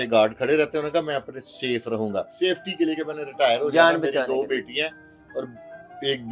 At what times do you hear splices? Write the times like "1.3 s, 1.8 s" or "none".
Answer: 2.3 s